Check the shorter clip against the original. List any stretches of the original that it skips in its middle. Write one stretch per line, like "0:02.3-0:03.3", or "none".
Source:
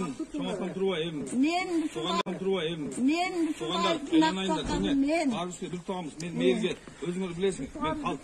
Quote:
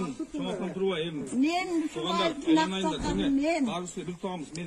0:02.2-0:03.9